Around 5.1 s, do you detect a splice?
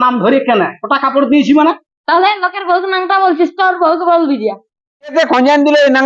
yes; 1 cut; at 5.1 s

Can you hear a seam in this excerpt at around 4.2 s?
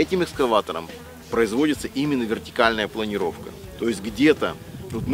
no; 1 cut; at 1.2 s

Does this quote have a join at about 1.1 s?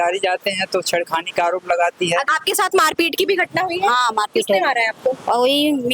no; 1 cut; at 2.3 s

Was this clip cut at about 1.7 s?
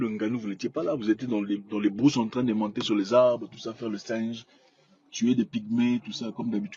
no; 0 cuts

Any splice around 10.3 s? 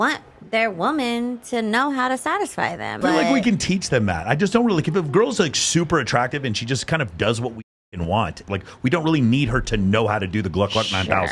no; 3 cuts; at 3.0 s, 6.3 s, 8.4 s

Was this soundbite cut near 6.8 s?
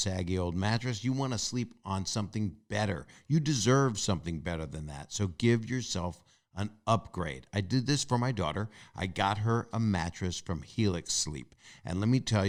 no; 0 cuts

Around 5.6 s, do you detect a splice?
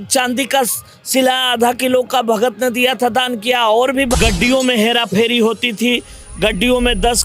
no; 1 cut; at 4.1 s

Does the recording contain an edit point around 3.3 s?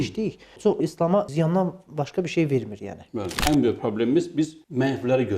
yes; 1 cut; at 3.3 s

